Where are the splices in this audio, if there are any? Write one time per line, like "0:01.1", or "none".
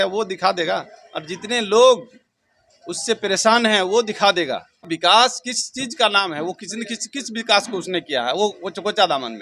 0:04.9